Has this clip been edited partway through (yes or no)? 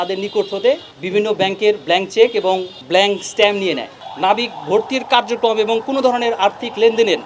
yes